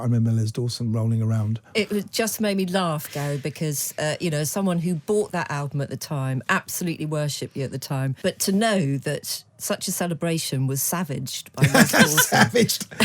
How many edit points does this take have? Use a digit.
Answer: 1